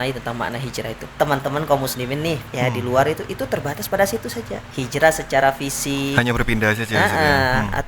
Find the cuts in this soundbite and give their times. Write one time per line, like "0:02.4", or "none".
0:01.1
0:02.5
0:04.6